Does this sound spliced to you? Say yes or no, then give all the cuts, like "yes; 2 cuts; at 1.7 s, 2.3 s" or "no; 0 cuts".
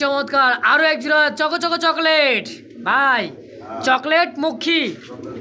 no; 0 cuts